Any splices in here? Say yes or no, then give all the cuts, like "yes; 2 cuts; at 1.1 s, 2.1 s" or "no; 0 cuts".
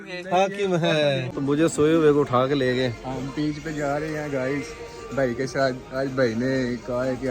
yes; 1 cut; at 1.3 s